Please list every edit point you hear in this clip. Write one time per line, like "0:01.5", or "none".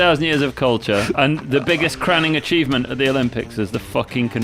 0:01.2